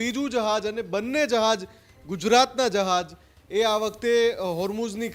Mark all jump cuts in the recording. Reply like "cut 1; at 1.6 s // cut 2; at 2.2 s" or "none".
none